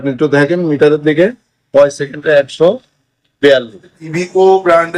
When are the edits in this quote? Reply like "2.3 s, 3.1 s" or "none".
4.0 s

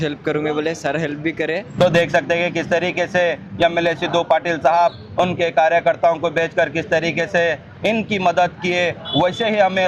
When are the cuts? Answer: 1.7 s

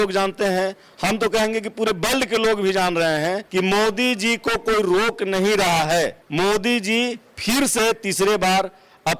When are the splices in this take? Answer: 3.4 s, 6.2 s

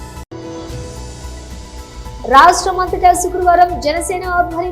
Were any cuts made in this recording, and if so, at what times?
2.1 s

